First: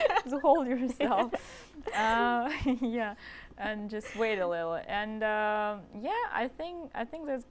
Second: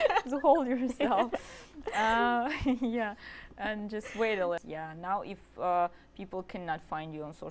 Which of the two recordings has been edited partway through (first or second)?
second